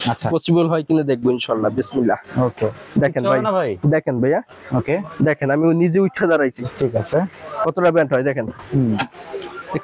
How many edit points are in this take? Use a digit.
0